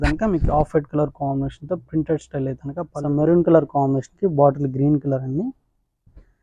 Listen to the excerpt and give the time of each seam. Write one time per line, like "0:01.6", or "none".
0:02.9